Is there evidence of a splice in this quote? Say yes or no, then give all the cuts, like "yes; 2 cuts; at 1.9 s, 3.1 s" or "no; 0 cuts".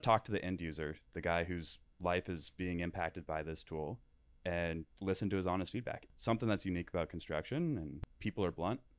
yes; 2 cuts; at 6.0 s, 8.0 s